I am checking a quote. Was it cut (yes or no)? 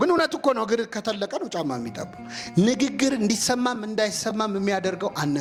no